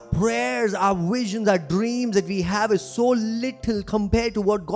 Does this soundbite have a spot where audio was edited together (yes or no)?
no